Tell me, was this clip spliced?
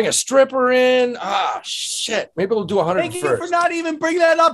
no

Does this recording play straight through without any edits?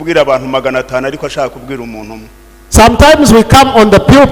yes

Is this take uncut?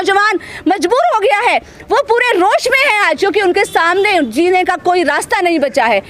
yes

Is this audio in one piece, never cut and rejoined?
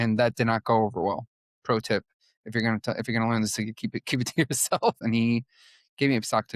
no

